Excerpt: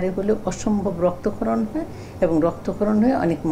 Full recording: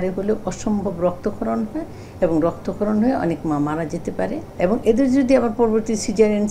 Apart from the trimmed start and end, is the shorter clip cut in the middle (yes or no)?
no